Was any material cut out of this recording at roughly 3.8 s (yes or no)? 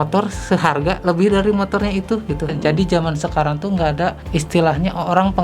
no